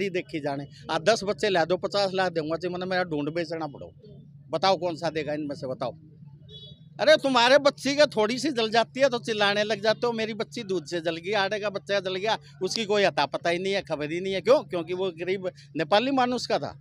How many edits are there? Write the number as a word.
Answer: zero